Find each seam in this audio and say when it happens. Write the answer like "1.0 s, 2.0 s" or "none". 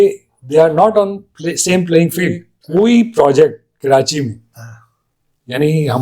2.5 s